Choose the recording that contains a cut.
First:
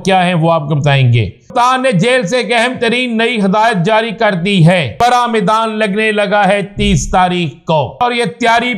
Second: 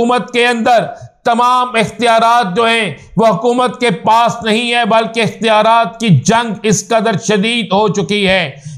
first; 3 cuts; at 1.5 s, 4.9 s, 8.0 s

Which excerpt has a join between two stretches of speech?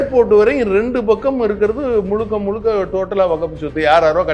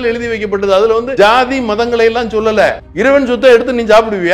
second; 2 cuts; at 1.1 s, 2.8 s

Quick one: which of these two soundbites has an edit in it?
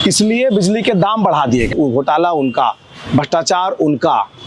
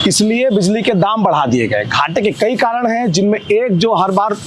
first; 1 cut; at 1.7 s

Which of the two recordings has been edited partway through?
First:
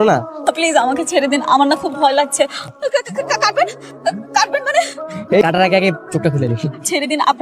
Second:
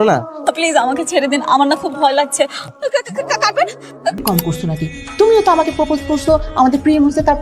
second; 1 cut; at 4.2 s

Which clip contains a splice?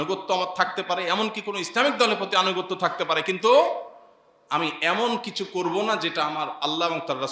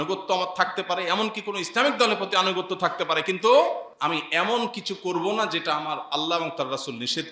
second; 1 cut; at 3.9 s

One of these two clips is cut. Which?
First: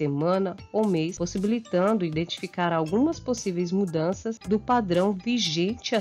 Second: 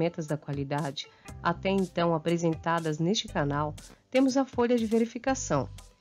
first; 2 cuts; at 1.2 s, 4.3 s

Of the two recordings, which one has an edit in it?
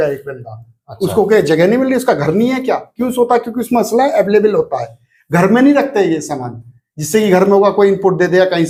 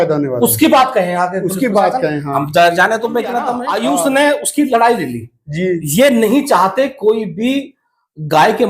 second; 1 cut; at 3.6 s

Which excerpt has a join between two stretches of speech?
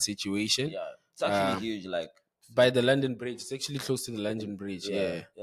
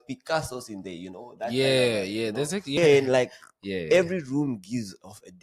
second; 1 cut; at 2.8 s

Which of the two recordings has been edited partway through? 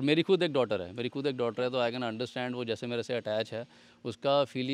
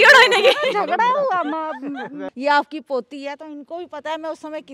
second; 1 cut; at 2.2 s

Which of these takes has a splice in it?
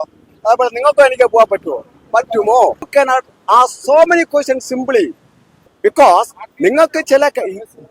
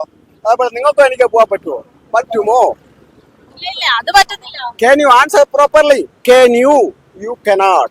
first; 2 cuts; at 2.8 s, 5.6 s

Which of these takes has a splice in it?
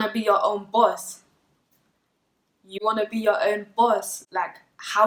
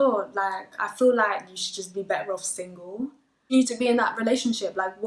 second; 1 cut; at 3.3 s

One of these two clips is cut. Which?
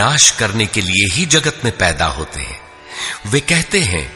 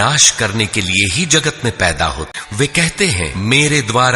second; 2 cuts; at 2.3 s, 3.3 s

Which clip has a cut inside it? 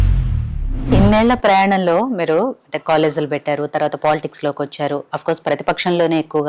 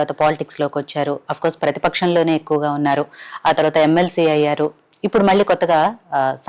first; 1 cut; at 0.9 s

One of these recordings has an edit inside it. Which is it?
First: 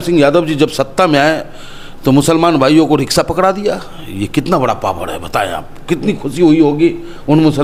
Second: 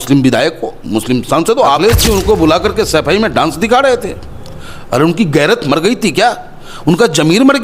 second; 1 cut; at 1.8 s

